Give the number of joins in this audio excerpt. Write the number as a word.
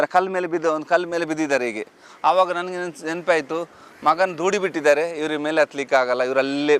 zero